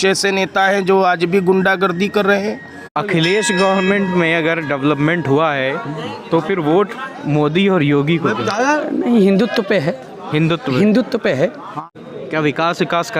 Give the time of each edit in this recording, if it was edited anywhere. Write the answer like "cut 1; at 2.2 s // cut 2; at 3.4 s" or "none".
cut 1; at 3.0 s // cut 2; at 11.7 s